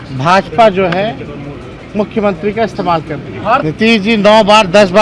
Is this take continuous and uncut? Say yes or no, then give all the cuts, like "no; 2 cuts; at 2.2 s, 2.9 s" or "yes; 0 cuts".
no; 1 cut; at 3.6 s